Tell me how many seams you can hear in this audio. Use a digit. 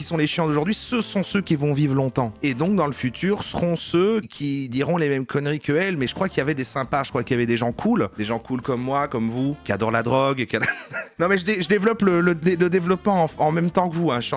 2